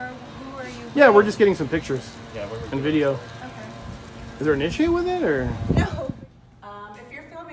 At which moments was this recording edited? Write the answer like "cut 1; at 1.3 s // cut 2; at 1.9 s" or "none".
cut 1; at 6.1 s

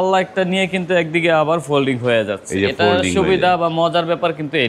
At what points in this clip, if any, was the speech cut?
none

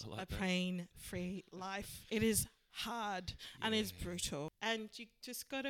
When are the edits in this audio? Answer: cut 1; at 1.9 s // cut 2; at 4.5 s

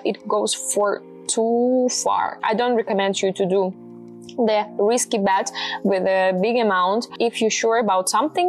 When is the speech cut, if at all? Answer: cut 1; at 2.3 s // cut 2; at 7.1 s

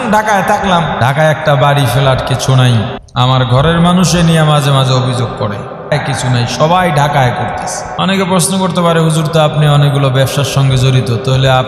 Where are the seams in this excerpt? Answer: cut 1; at 1.0 s // cut 2; at 3.0 s // cut 3; at 5.9 s // cut 4; at 7.8 s

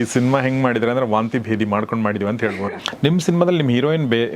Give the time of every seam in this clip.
cut 1; at 2.4 s

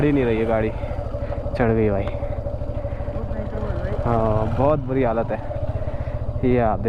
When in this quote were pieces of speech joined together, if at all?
none

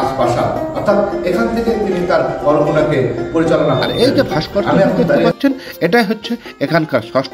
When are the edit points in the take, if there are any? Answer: cut 1; at 5.3 s

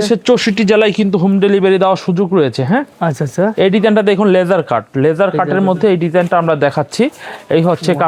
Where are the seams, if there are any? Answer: none

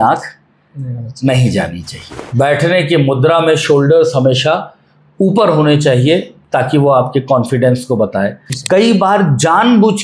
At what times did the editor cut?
cut 1; at 2.1 s // cut 2; at 8.5 s

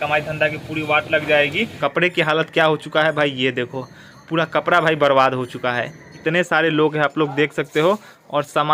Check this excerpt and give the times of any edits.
cut 1; at 1.7 s // cut 2; at 6.1 s

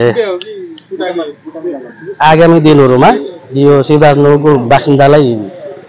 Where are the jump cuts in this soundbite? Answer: none

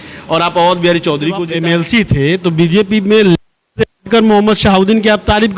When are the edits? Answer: cut 1; at 1.5 s

